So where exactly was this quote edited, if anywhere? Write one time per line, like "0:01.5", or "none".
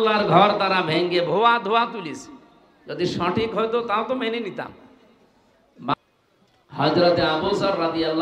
0:05.9